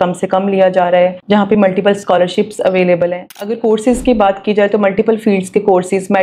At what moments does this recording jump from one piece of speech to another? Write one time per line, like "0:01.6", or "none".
0:03.3